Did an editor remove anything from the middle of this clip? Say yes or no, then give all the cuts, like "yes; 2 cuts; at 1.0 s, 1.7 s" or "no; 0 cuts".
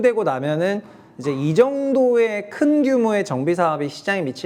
no; 0 cuts